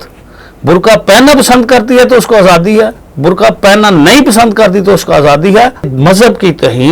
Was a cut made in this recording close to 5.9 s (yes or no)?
yes